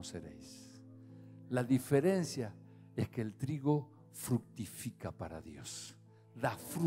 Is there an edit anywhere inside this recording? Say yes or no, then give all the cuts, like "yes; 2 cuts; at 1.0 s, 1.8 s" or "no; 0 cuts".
no; 0 cuts